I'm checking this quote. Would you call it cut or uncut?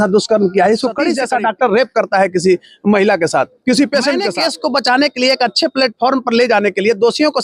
cut